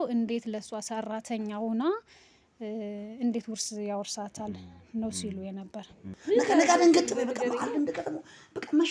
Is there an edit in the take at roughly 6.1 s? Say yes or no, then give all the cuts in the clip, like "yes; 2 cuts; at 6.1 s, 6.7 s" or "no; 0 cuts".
yes; 1 cut; at 6.1 s